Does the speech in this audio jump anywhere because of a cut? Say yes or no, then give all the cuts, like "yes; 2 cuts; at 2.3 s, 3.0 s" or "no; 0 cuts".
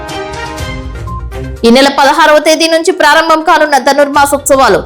yes; 1 cut; at 1.2 s